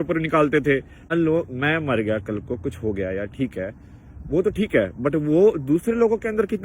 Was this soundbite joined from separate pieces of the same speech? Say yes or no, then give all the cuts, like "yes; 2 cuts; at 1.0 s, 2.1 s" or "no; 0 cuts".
yes; 1 cut; at 1.1 s